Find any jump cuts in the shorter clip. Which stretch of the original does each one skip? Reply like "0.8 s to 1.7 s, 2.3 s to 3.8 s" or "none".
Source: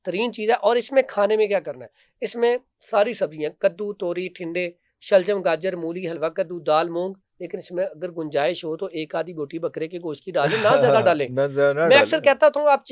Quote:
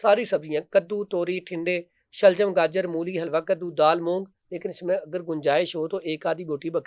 none